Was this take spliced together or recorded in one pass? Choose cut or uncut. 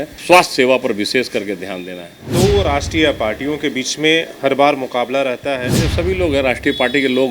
cut